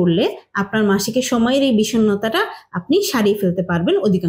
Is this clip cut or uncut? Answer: uncut